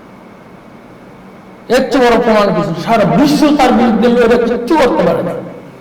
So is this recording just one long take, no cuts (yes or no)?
yes